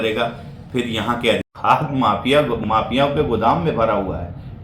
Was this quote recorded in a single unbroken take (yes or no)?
no